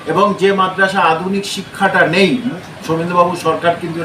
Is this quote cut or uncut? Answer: cut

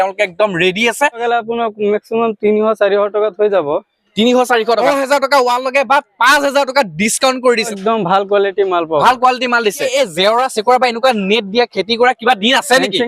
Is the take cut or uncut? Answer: cut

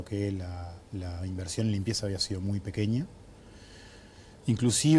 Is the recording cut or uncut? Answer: uncut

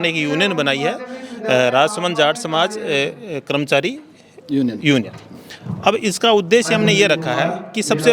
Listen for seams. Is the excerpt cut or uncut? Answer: uncut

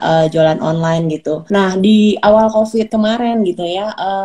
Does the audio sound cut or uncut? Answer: cut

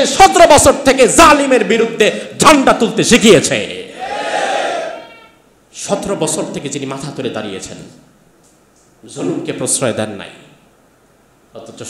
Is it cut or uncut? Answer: uncut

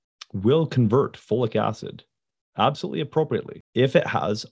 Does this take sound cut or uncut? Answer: cut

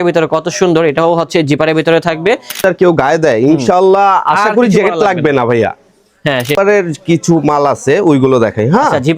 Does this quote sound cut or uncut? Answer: cut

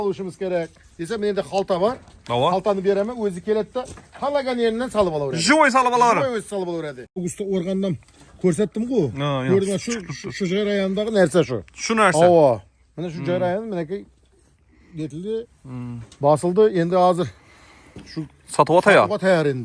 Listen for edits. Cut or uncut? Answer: cut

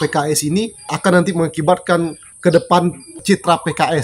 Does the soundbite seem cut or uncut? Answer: cut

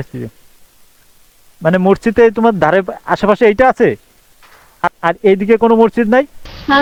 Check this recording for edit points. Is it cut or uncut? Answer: uncut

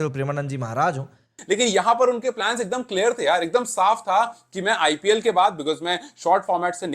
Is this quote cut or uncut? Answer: cut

